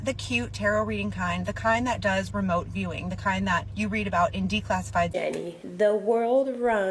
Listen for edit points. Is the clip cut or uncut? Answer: cut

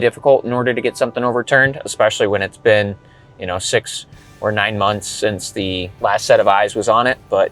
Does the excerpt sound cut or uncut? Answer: cut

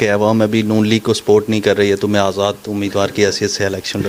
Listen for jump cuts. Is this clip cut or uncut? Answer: uncut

